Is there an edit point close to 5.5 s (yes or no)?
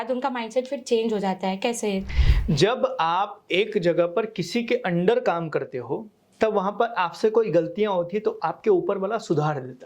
no